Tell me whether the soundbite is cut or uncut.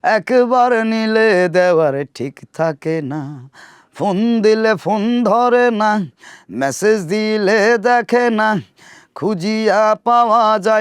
uncut